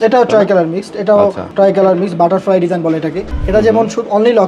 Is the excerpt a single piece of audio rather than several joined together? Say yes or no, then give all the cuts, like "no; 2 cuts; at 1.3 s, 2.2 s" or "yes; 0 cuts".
no; 2 cuts; at 1.4 s, 3.3 s